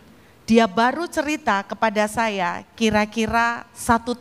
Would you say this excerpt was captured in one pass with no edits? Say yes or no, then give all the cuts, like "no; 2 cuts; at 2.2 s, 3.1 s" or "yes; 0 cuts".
yes; 0 cuts